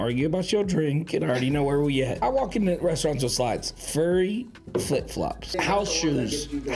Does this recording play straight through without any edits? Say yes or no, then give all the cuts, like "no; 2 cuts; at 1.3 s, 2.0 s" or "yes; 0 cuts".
no; 2 cuts; at 2.2 s, 5.5 s